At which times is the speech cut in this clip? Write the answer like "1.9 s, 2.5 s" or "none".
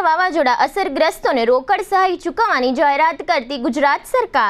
none